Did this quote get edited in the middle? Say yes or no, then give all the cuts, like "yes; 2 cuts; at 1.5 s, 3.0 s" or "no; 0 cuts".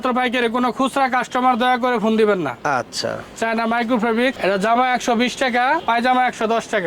no; 0 cuts